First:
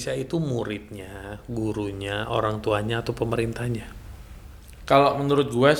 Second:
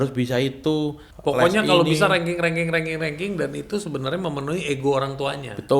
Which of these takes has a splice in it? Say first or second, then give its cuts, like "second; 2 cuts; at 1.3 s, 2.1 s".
second; 1 cut; at 1.1 s